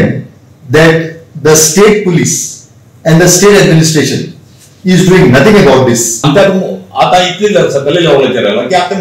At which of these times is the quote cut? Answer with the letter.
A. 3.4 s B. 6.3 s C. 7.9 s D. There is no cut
B